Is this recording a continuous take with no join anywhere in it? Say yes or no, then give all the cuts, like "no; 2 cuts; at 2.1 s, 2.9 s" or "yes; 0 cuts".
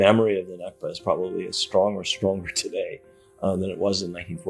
yes; 0 cuts